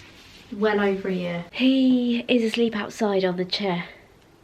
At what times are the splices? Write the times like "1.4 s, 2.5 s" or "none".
1.4 s